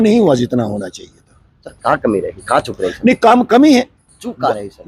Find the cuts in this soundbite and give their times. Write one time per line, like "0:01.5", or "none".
none